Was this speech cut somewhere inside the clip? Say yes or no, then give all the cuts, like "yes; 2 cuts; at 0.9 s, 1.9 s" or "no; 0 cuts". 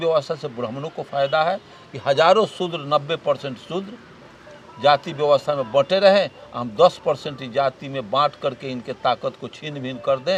no; 0 cuts